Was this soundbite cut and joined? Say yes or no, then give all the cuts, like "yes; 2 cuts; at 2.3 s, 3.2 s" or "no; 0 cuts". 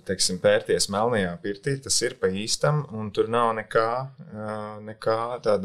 no; 0 cuts